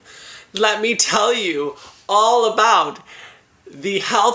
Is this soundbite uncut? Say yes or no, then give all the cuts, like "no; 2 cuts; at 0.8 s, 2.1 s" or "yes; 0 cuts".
yes; 0 cuts